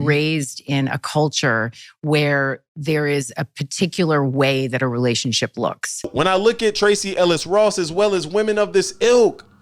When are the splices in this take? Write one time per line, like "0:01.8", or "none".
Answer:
0:05.9